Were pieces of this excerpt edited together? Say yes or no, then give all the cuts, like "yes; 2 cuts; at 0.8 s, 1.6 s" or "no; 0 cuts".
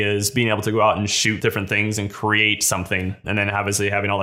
yes; 2 cuts; at 1.4 s, 3.2 s